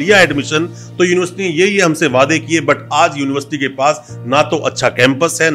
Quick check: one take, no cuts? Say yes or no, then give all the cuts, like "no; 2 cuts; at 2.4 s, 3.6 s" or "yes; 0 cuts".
yes; 0 cuts